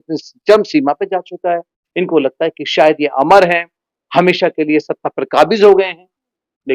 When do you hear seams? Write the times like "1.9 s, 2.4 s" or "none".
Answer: none

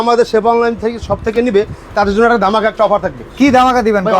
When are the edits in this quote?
none

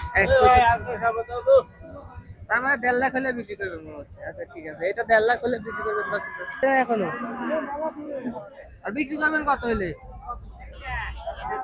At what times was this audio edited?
6.6 s

